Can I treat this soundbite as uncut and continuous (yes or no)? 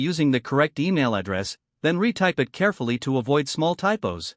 yes